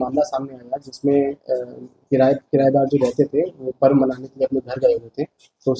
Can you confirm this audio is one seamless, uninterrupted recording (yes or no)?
yes